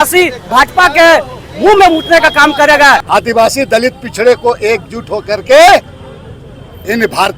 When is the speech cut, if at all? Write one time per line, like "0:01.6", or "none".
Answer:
0:03.0